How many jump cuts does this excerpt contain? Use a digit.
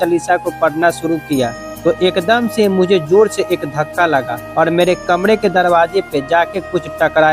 2